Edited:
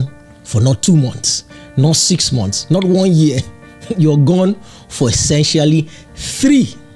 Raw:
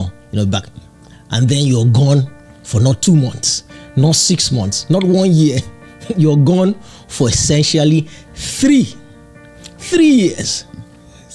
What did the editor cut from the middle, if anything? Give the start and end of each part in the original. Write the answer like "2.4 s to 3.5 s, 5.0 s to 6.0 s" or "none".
none

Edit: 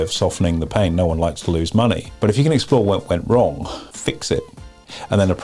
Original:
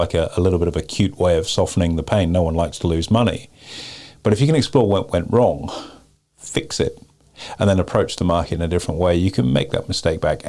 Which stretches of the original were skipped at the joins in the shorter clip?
3.4 s to 4.1 s, 5.9 s to 6.3 s

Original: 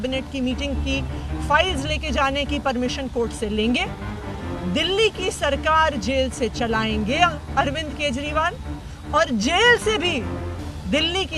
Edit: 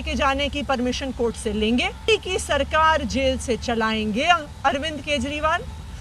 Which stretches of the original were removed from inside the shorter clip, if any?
4.0 s to 5.0 s

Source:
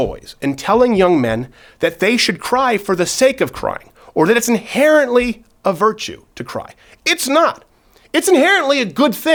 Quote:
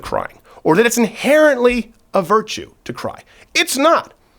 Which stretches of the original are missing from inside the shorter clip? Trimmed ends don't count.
none

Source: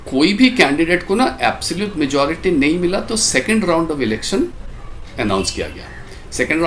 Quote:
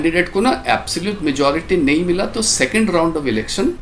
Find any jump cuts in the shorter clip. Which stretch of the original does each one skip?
none

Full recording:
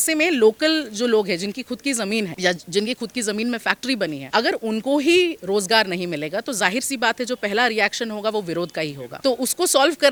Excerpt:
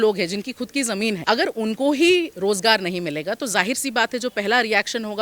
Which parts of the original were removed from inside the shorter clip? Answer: 2.3 s to 4.3 s

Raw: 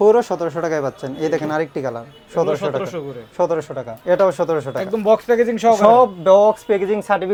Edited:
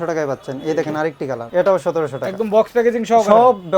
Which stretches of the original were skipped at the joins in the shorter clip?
2.0 s to 4.0 s

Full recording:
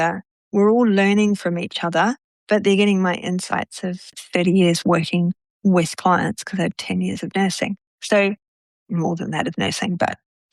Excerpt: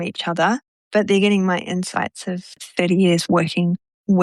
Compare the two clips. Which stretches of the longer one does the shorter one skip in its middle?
none

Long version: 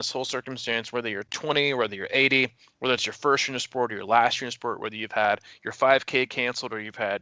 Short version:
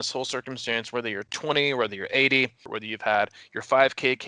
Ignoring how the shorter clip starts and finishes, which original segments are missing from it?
2.7 s to 4.8 s

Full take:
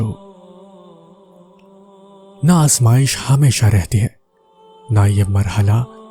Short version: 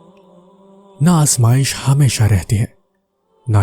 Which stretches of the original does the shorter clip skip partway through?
2.0 s to 2.4 s

